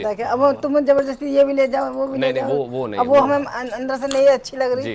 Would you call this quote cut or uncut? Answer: uncut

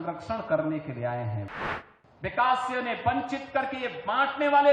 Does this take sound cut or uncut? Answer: cut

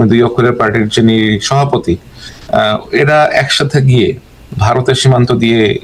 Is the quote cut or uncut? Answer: uncut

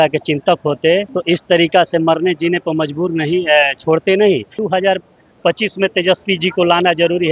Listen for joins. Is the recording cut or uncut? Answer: cut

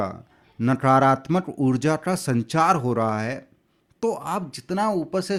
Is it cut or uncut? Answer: uncut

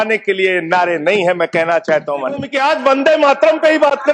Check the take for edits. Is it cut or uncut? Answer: cut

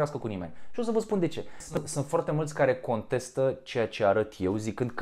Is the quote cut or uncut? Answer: cut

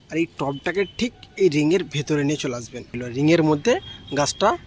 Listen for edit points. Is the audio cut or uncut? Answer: cut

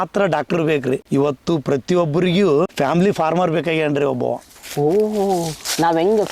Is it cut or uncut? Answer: cut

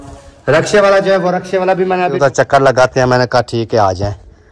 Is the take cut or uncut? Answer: cut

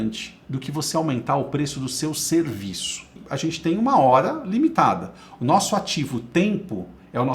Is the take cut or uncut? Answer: cut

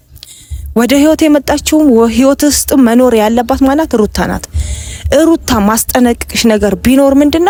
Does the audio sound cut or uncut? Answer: uncut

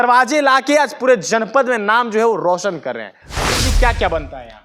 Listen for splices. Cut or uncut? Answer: cut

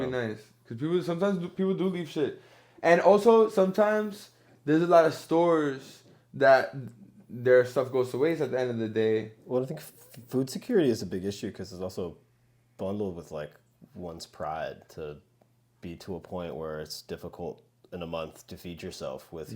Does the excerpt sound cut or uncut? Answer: uncut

